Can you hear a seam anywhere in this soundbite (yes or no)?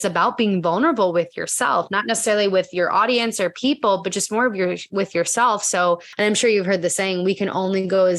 yes